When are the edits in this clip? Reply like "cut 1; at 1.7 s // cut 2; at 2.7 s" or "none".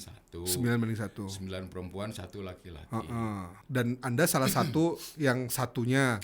cut 1; at 3.6 s

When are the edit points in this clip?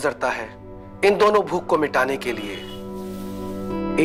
none

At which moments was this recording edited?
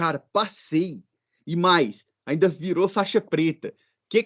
none

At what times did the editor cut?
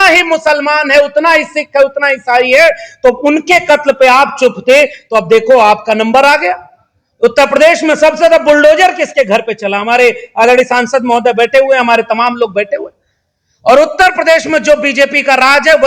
none

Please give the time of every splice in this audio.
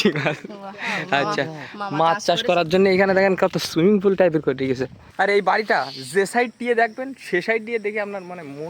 cut 1; at 5.0 s

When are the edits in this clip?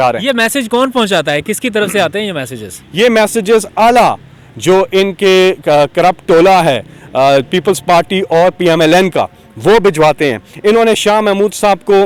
none

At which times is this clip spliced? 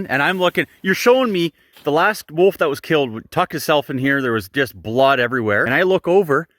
cut 1; at 5.7 s

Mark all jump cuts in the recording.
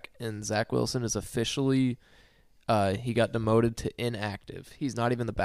none

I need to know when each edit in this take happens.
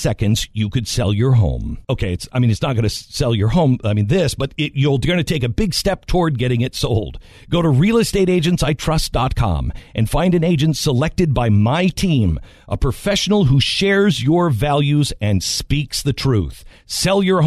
cut 1; at 1.7 s

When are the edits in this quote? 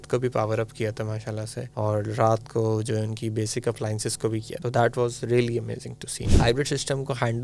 cut 1; at 1.6 s // cut 2; at 4.5 s // cut 3; at 6.3 s

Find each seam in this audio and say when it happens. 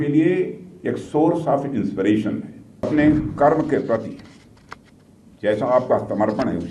cut 1; at 2.9 s

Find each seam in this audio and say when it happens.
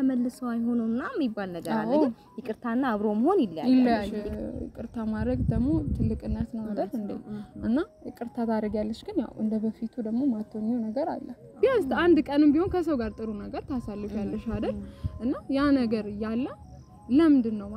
cut 1; at 4.2 s // cut 2; at 11.5 s

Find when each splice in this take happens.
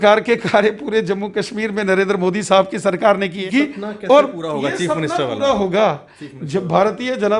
cut 1; at 3.5 s

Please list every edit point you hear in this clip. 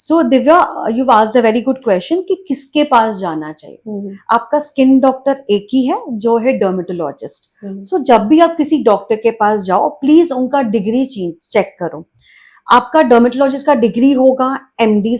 none

